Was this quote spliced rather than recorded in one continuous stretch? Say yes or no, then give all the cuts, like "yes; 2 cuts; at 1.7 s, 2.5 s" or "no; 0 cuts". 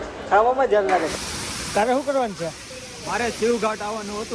yes; 1 cut; at 1.1 s